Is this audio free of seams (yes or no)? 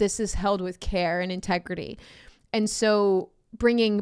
yes